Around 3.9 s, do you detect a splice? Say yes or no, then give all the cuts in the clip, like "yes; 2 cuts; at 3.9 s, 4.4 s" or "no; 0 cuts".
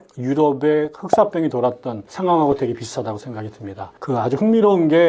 no; 0 cuts